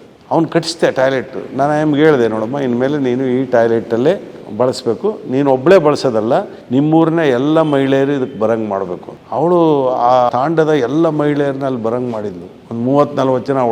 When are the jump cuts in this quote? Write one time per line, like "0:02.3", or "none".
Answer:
0:04.4
0:10.3